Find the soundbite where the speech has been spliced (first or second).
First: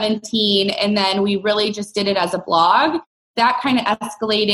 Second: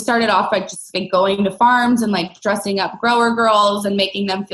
first